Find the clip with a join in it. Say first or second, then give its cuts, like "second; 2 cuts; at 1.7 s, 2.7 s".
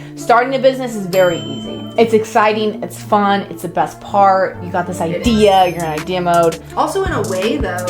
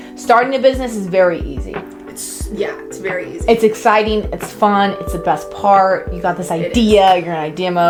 first; 2 cuts; at 1.8 s, 6.6 s